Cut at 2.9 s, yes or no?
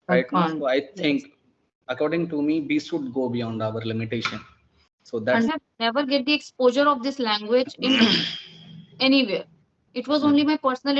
no